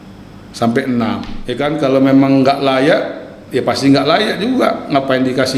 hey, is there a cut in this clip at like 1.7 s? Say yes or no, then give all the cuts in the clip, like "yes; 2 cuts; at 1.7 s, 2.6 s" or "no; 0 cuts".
yes; 1 cut; at 1.7 s